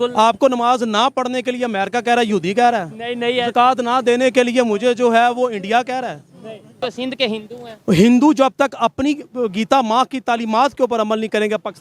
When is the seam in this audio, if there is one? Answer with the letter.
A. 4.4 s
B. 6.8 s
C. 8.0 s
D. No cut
B